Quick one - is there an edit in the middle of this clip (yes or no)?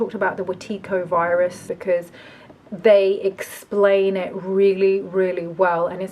yes